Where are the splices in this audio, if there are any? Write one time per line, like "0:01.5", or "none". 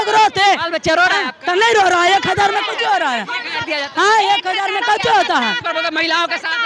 none